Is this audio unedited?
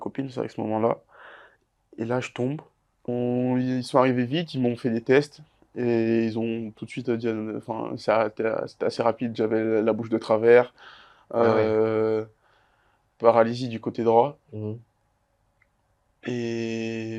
no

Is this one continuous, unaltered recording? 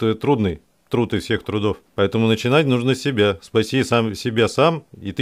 no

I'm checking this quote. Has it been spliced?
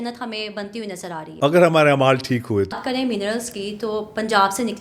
yes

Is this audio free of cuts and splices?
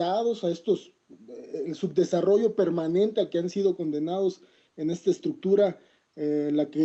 no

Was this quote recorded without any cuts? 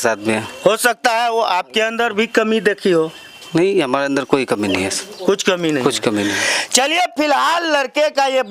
yes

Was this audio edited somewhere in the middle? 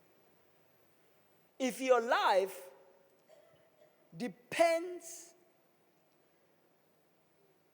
yes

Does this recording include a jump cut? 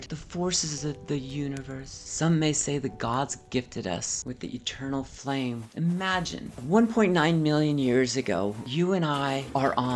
yes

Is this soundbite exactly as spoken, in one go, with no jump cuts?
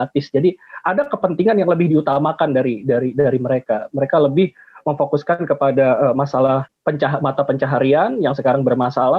no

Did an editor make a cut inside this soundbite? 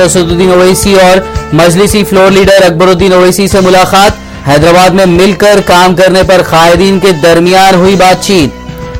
no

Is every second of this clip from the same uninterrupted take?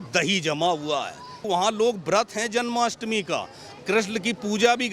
no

